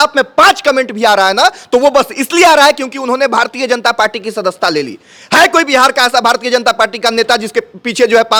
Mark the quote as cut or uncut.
uncut